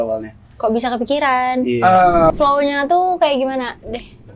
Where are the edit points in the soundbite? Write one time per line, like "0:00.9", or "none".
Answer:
0:02.3